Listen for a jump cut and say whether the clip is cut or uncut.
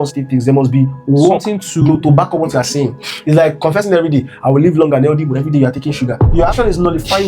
cut